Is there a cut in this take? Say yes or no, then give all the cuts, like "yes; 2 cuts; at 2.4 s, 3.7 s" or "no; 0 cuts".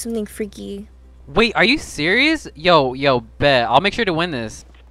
no; 0 cuts